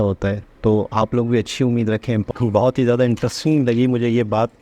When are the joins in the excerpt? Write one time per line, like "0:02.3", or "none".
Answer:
0:02.3